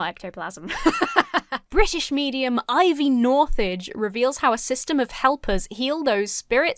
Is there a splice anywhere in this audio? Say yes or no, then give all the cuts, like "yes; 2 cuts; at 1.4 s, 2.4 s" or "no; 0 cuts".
yes; 1 cut; at 1.6 s